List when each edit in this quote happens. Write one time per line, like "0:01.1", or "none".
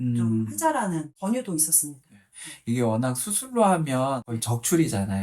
0:01.2
0:04.3